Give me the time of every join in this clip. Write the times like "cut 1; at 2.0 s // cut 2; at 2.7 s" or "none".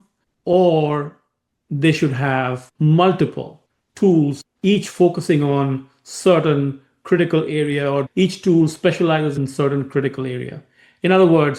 cut 1; at 8.1 s // cut 2; at 9.3 s